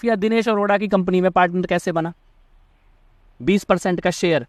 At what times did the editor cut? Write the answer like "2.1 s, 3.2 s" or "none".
none